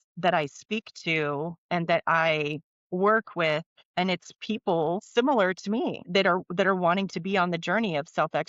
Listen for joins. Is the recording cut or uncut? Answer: cut